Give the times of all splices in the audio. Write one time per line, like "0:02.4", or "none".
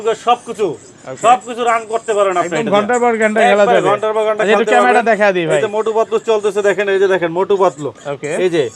none